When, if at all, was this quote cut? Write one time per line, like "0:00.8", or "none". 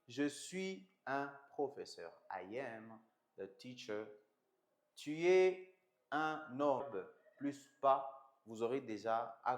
0:06.8